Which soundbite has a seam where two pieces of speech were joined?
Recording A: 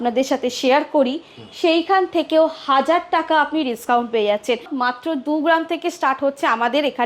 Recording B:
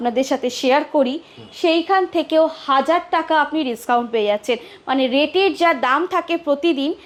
A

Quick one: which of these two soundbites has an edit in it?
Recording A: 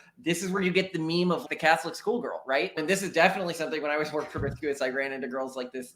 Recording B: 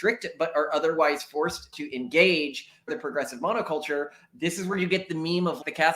B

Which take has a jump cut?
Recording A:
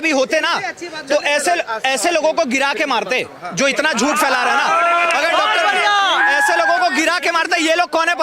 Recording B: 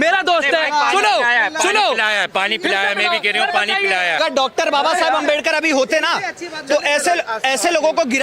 B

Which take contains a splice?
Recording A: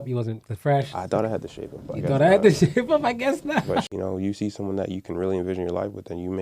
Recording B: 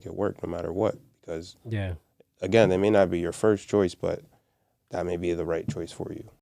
A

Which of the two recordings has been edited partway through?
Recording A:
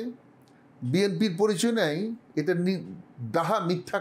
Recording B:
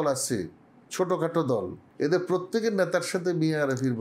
B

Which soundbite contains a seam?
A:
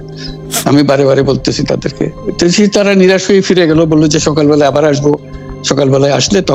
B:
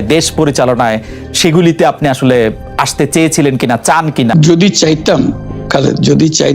B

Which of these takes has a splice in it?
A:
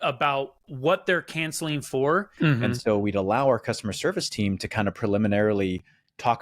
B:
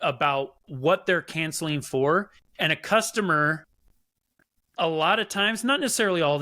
A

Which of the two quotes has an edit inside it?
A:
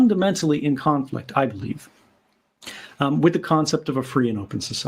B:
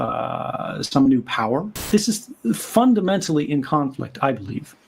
B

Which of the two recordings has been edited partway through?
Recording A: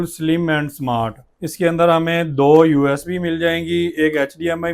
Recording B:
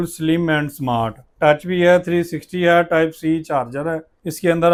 A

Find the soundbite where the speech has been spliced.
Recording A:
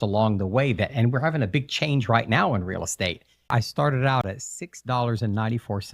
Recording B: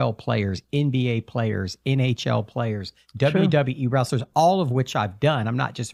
A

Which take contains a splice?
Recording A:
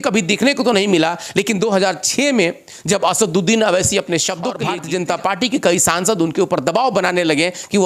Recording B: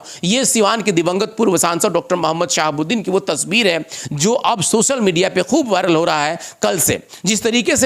A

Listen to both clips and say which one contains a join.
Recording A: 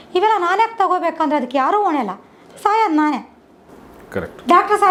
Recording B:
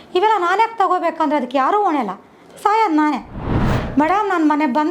B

